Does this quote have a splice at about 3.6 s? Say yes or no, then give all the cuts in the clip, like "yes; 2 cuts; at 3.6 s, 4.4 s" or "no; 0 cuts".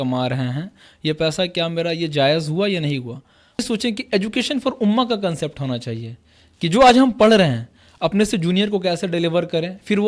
yes; 1 cut; at 3.6 s